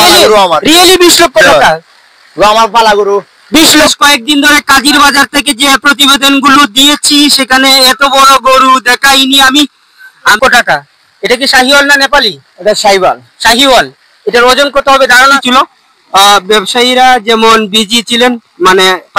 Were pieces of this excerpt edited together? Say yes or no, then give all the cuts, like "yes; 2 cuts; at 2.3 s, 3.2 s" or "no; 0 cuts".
yes; 3 cuts; at 3.9 s, 10.4 s, 15.4 s